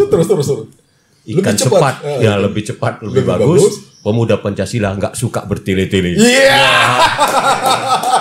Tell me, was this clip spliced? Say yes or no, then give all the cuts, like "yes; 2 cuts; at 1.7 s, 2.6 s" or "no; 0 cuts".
no; 0 cuts